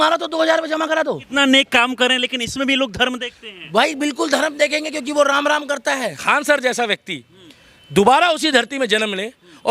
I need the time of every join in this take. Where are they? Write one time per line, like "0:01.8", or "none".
0:01.2
0:06.2

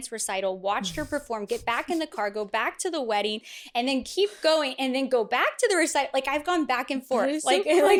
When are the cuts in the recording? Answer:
none

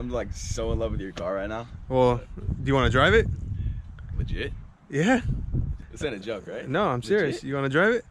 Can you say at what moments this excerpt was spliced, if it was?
0:05.8

